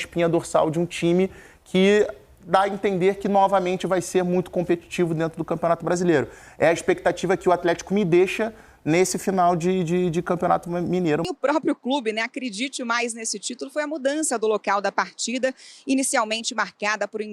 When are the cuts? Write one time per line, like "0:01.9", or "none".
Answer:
0:11.3

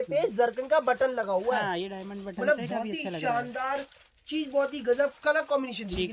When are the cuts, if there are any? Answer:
none

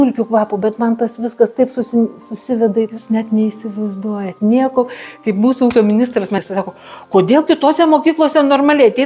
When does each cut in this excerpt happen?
0:02.9
0:06.4

